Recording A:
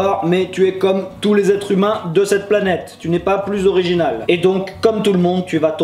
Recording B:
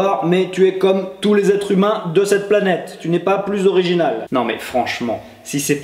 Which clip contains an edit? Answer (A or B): B